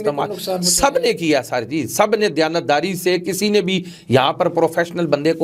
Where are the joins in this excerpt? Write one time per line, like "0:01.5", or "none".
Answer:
none